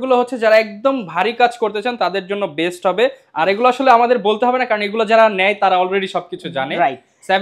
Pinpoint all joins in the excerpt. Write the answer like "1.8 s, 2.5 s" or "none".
none